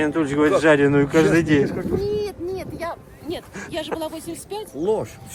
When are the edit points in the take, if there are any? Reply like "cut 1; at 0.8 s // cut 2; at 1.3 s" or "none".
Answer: none